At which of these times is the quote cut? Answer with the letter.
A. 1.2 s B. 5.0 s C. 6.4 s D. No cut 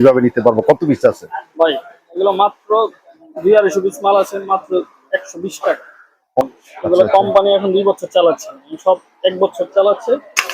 C